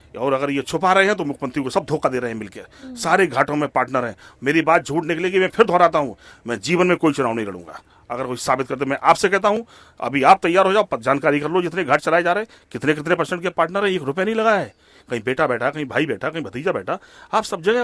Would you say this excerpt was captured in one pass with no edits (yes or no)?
yes